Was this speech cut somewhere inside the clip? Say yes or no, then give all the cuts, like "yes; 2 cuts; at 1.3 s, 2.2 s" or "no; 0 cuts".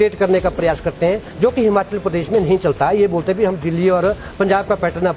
no; 0 cuts